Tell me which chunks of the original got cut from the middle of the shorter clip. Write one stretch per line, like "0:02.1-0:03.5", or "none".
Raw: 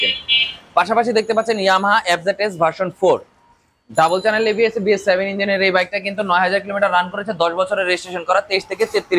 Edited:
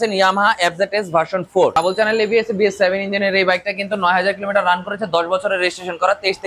0:03.2-0:04.0